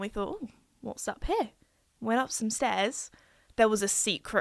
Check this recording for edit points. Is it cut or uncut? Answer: uncut